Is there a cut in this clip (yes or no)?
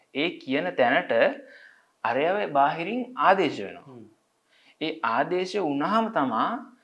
no